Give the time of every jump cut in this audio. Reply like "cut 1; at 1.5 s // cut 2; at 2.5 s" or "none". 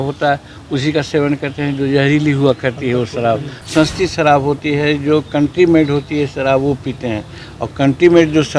cut 1; at 3.5 s